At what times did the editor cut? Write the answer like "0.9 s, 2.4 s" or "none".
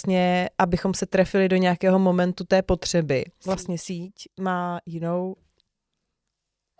3.3 s